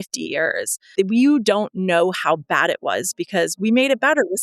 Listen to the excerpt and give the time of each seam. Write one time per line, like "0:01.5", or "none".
0:00.9